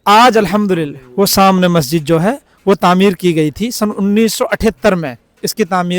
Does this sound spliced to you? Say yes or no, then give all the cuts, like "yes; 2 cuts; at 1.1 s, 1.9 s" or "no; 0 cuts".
no; 0 cuts